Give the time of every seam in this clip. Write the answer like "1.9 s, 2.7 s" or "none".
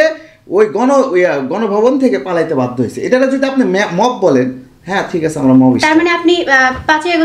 none